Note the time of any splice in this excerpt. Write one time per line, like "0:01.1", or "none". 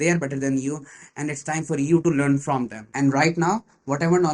0:02.8